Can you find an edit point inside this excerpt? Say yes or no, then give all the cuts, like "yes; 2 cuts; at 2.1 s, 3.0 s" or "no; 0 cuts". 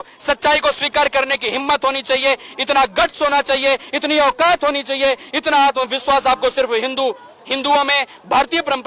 no; 0 cuts